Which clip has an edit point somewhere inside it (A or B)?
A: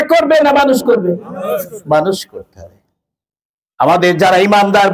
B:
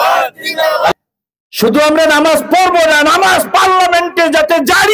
B